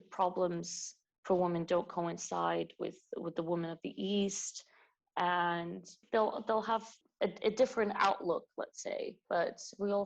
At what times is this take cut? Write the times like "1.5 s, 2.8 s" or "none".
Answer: 5.9 s, 7.0 s, 9.2 s

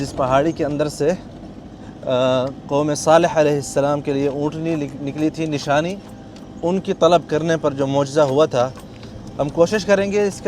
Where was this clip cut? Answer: none

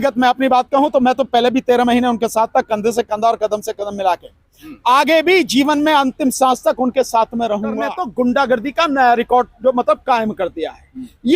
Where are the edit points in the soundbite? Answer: 8.0 s

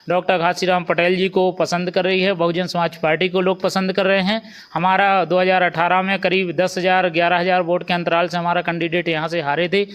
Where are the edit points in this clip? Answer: none

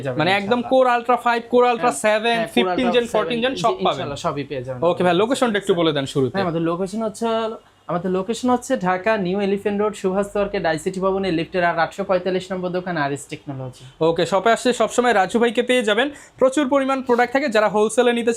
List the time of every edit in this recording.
none

